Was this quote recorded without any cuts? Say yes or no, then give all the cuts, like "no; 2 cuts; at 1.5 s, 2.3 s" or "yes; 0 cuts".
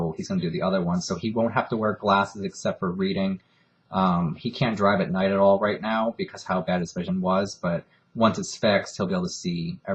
yes; 0 cuts